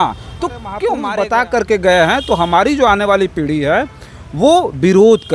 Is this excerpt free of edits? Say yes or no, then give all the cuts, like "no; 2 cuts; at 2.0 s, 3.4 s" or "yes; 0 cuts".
no; 1 cut; at 1.0 s